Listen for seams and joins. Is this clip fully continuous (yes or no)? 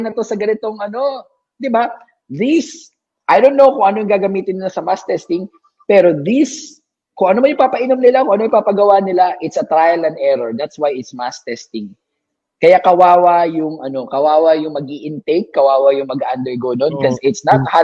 yes